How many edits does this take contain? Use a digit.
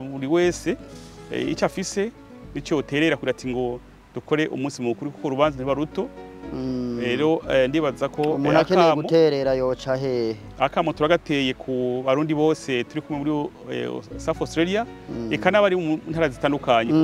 0